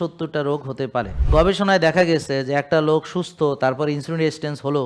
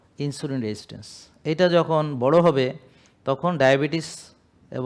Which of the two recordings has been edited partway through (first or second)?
first